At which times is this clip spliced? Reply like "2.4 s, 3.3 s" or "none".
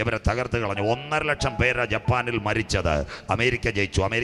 none